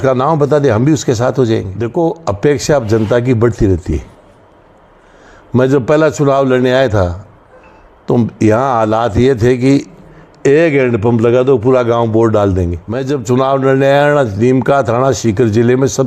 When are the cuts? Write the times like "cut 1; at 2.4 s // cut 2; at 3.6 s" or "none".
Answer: cut 1; at 1.8 s // cut 2; at 12.9 s